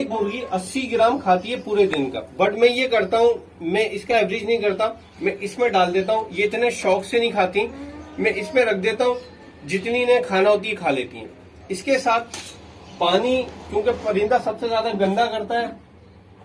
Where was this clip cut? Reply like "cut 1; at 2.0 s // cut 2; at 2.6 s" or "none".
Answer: none